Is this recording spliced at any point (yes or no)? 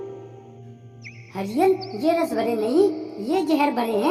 no